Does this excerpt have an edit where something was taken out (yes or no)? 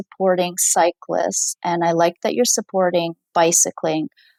no